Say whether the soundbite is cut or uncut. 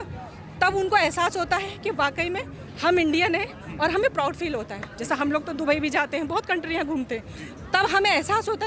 uncut